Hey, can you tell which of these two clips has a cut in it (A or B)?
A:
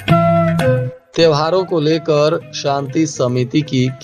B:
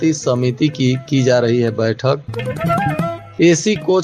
A